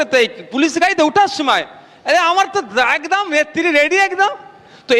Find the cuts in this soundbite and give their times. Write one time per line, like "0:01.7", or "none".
none